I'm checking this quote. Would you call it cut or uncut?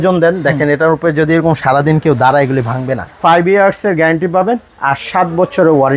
cut